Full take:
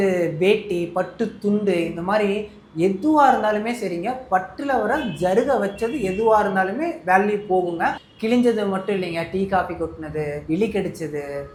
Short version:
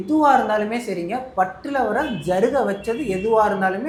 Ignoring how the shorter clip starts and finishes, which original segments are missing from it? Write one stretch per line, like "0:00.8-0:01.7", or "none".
none

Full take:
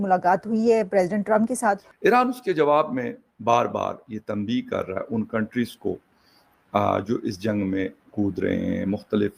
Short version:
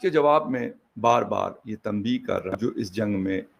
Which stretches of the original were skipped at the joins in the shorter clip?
0:05.0-0:07.0

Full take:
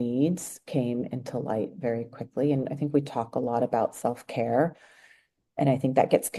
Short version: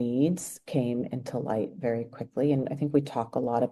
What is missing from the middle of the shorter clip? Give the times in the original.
none

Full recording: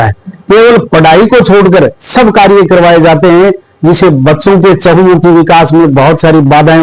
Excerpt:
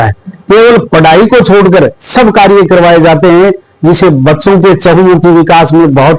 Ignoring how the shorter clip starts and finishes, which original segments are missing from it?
none

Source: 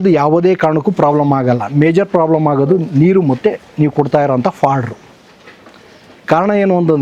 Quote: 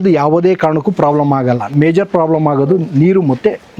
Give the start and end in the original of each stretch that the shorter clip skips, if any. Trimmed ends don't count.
none

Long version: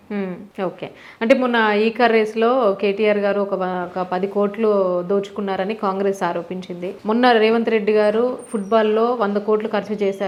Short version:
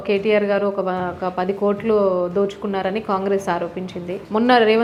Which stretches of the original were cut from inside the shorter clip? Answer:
none

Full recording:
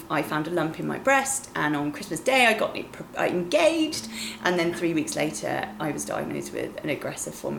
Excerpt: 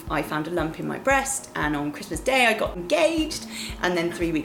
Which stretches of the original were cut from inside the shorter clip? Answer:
0:02.8-0:03.4

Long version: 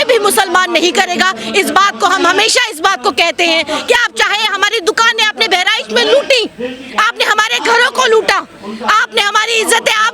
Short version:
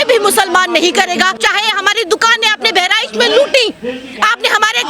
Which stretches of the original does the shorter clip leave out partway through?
0:01.3-0:04.1

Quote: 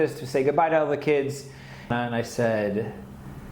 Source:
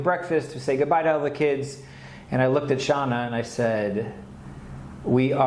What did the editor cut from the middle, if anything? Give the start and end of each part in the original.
0:02.2-0:03.1

